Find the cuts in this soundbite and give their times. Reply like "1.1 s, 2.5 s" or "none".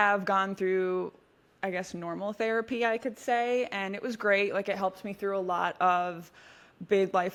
none